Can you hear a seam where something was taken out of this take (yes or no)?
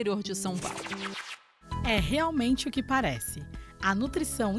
yes